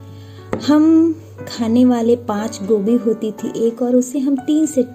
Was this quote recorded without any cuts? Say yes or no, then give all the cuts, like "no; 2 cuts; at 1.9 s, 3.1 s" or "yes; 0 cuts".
yes; 0 cuts